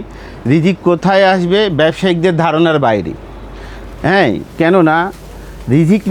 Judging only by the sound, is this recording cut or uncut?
uncut